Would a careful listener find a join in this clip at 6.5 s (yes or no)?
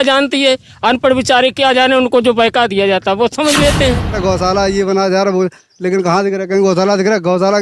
no